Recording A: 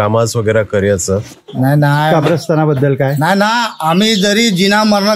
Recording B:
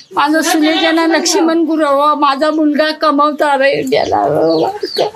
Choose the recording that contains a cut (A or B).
A